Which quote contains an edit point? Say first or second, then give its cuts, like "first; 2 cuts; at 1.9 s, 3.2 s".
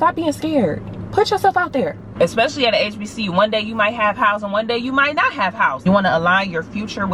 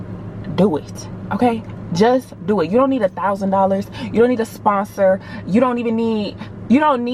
first; 2 cuts; at 2.0 s, 5.8 s